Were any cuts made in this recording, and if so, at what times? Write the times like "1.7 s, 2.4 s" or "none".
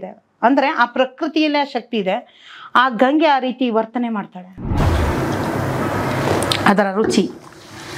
4.7 s